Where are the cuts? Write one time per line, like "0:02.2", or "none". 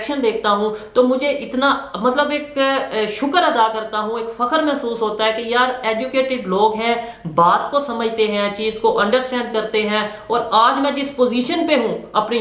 none